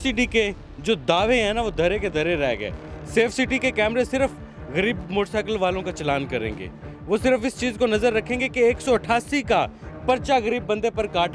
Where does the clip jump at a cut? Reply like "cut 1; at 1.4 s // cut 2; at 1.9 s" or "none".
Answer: none